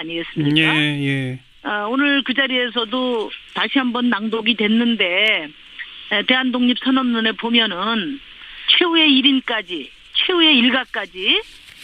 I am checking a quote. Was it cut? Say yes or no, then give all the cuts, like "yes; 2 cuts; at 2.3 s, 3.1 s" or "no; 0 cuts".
yes; 1 cut; at 6.8 s